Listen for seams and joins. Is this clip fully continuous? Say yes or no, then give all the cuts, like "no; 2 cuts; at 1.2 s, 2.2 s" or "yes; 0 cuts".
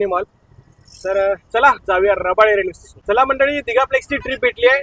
no; 1 cut; at 2.9 s